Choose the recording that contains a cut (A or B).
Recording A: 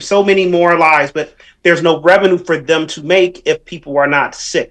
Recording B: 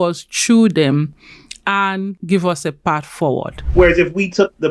B